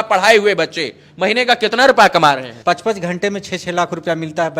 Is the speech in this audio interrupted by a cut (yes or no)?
yes